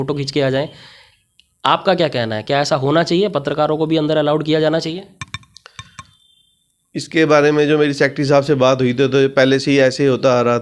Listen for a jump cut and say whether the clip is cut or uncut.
uncut